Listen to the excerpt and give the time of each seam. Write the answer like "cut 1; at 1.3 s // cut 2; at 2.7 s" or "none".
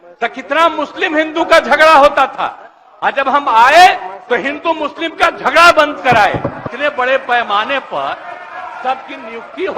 cut 1; at 6.7 s